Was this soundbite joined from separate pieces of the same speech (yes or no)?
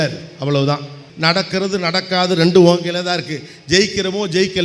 yes